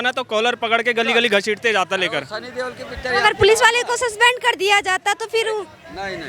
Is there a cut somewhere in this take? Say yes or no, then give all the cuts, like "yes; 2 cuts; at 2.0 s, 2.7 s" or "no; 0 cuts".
no; 0 cuts